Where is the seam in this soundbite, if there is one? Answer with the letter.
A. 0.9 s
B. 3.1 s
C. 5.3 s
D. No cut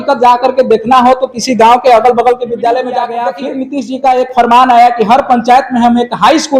B